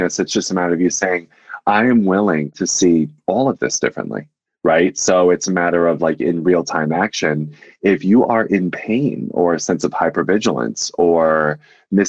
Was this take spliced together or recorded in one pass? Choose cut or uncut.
cut